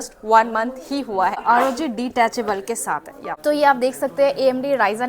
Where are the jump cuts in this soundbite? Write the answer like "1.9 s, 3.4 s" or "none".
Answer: 1.4 s, 3.3 s